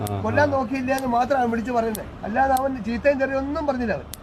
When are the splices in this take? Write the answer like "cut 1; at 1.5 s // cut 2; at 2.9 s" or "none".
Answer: cut 1; at 2.1 s